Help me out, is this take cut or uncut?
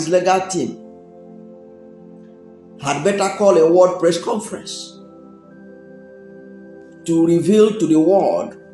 cut